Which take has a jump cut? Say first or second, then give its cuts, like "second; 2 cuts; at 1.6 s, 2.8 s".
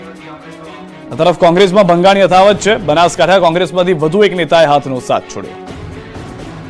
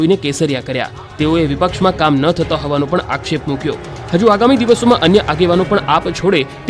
first; 1 cut; at 0.9 s